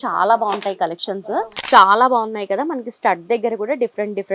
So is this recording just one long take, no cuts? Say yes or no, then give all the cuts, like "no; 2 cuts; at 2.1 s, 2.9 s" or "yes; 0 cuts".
no; 1 cut; at 1.5 s